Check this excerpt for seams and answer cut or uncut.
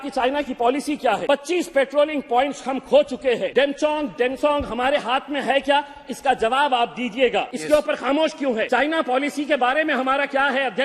cut